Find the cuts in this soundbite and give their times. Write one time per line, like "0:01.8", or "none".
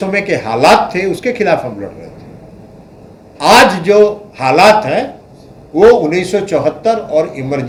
none